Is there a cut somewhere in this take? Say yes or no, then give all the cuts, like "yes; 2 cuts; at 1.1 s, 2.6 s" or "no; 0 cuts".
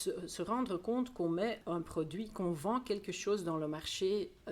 yes; 1 cut; at 1.6 s